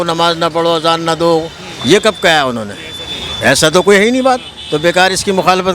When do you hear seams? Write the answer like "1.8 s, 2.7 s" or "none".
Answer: none